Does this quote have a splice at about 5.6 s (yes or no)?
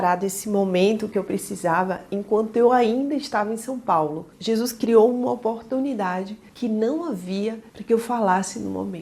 no